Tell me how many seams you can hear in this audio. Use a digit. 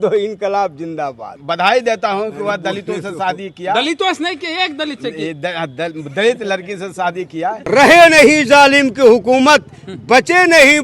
2